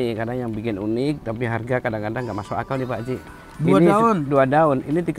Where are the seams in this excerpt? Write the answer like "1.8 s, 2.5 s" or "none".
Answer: none